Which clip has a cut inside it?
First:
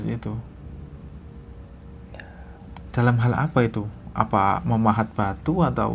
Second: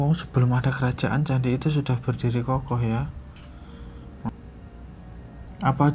second; 1 cut; at 4.3 s

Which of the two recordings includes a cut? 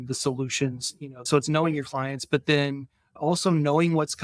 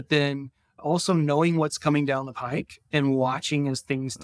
first; 1 cut; at 1.3 s

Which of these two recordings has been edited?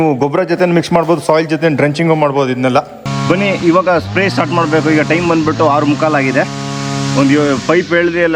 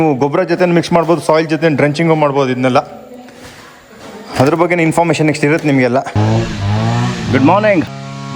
first; 1 cut; at 3.0 s

